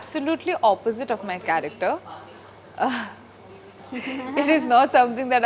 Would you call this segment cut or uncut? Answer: uncut